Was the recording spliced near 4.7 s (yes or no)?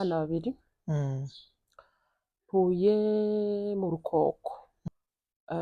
yes